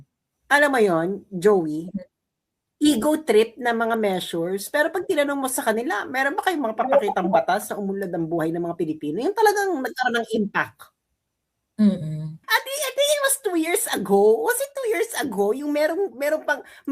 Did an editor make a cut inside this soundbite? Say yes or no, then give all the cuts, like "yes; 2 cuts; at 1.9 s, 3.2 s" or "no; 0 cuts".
yes; 1 cut; at 12.3 s